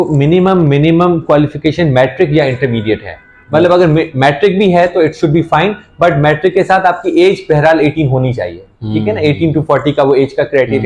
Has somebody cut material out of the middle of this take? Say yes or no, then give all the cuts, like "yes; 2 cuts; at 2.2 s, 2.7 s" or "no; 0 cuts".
no; 0 cuts